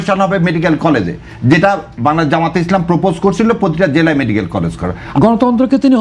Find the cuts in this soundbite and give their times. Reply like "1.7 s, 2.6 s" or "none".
5.0 s